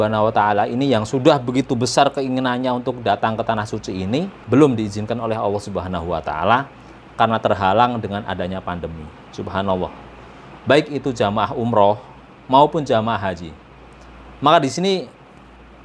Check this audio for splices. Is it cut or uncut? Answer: cut